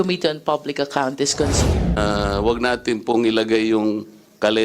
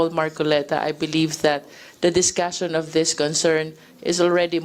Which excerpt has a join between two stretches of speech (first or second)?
first